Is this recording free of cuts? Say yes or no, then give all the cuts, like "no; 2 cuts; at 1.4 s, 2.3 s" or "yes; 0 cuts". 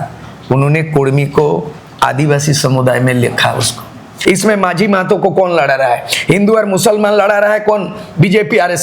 no; 1 cut; at 4.1 s